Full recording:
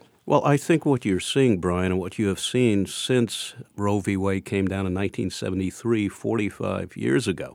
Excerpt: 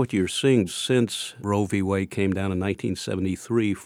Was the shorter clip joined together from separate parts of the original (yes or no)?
yes